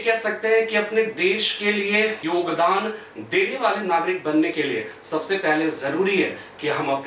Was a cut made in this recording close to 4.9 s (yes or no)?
no